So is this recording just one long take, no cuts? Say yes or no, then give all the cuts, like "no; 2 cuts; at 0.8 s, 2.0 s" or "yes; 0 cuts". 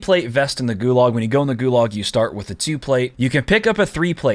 no; 1 cut; at 3.1 s